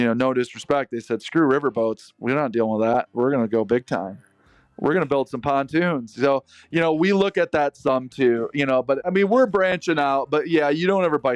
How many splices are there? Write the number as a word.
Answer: zero